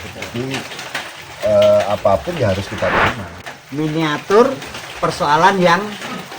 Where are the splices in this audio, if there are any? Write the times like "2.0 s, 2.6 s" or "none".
3.3 s